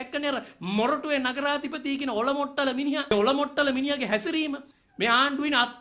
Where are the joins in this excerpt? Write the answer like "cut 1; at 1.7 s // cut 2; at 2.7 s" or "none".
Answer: cut 1; at 3.1 s // cut 2; at 4.7 s